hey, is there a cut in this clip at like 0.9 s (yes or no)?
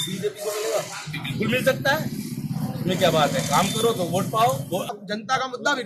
no